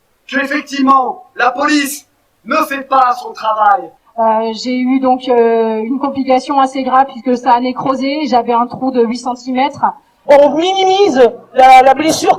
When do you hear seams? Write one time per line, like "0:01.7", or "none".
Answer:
0:04.0
0:10.1

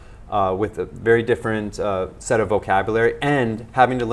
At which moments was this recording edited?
none

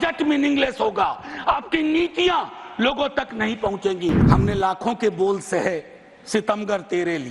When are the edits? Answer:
0:04.2

